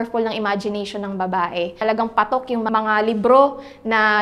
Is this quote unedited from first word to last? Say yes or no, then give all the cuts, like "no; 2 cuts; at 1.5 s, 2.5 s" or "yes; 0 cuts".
no; 2 cuts; at 1.8 s, 2.7 s